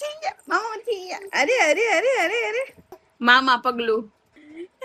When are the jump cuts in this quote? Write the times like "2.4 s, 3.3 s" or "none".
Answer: none